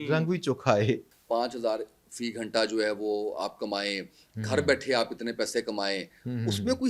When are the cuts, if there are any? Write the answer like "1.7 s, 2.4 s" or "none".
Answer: 1.1 s